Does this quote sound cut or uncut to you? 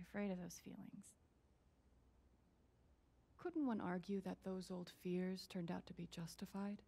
uncut